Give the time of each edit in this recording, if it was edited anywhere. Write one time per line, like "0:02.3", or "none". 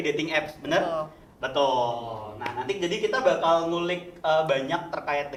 none